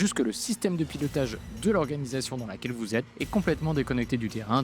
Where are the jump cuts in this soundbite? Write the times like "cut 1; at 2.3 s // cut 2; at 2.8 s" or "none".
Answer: cut 1; at 3.1 s